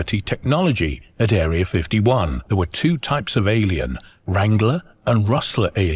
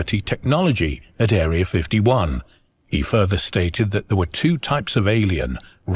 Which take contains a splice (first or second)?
first